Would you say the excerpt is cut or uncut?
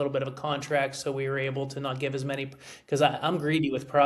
uncut